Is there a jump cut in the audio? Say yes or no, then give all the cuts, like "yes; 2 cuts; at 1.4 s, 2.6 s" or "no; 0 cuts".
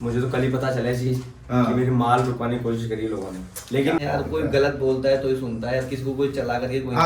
yes; 1 cut; at 4.0 s